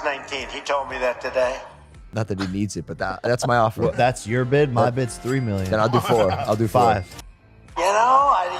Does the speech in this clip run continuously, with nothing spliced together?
no; 2 cuts; at 2.0 s, 7.1 s

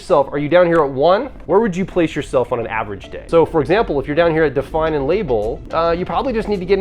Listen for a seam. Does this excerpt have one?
yes; 3 cuts; at 1.3 s, 3.2 s, 5.6 s

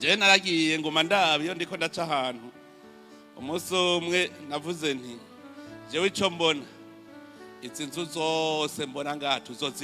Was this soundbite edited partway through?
no; 0 cuts

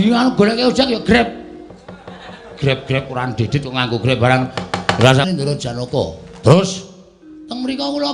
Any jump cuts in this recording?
yes; 1 cut; at 5.3 s

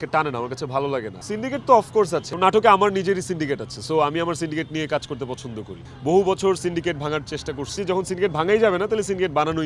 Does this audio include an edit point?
yes; 4 cuts; at 1.2 s, 2.3 s, 5.8 s, 7.7 s

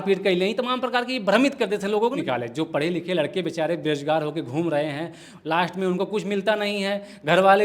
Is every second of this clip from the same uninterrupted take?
no; 1 cut; at 2.2 s

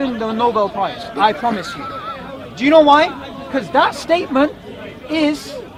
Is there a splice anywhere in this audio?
no; 0 cuts

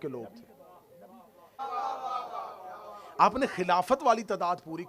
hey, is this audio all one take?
no; 1 cut; at 1.6 s

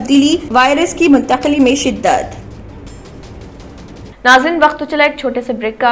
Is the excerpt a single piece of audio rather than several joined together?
no; 1 cut; at 4.2 s

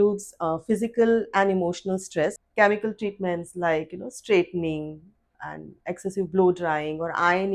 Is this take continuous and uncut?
no; 1 cut; at 2.4 s

